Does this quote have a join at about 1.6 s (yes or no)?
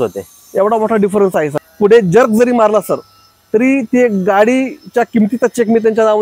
yes